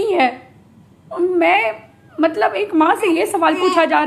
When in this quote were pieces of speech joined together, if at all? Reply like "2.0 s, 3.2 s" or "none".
none